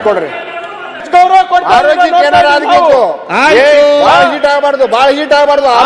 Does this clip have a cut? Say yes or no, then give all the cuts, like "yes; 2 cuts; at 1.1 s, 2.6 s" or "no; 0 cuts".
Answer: yes; 1 cut; at 1.0 s